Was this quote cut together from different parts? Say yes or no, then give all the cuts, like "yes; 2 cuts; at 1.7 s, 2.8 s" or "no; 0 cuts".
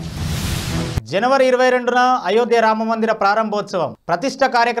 no; 0 cuts